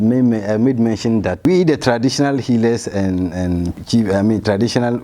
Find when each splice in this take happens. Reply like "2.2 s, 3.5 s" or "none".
1.4 s, 3.8 s